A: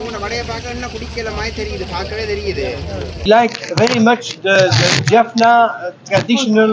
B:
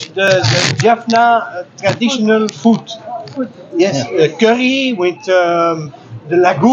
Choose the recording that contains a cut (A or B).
A